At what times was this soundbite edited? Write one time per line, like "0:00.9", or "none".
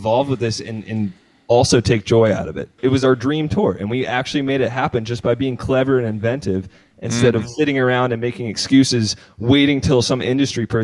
0:02.8